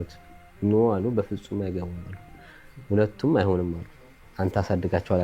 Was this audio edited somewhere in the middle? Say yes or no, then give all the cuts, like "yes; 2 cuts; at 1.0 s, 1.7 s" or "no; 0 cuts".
no; 0 cuts